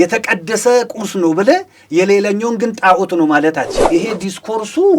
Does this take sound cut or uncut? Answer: cut